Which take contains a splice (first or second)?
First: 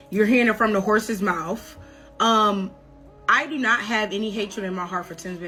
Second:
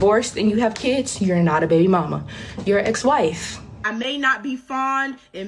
second